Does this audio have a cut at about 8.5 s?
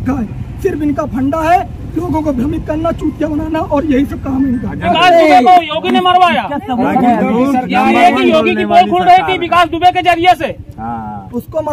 no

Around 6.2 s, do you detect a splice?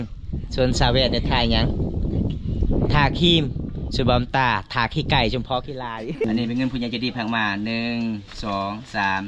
yes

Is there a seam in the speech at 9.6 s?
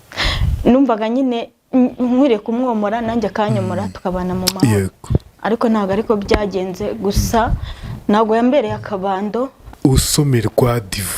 yes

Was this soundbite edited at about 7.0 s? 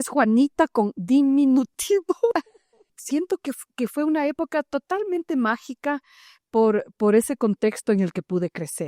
no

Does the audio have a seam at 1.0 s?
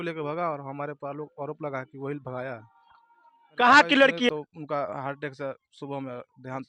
no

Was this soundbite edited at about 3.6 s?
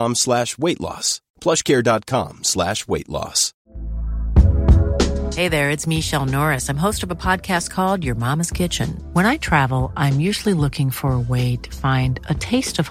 yes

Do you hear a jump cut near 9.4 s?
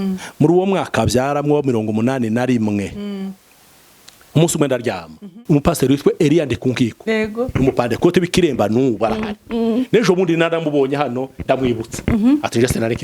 no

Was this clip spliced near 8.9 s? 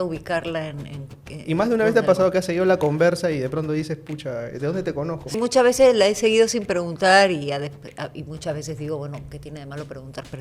no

